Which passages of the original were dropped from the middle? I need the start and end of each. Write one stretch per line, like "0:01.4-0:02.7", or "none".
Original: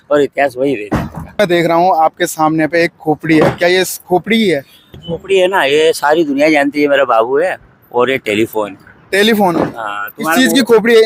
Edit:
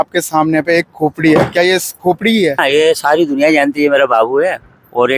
0:04.6-0:05.6